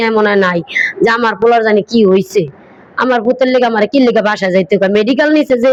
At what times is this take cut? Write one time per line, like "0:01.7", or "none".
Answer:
none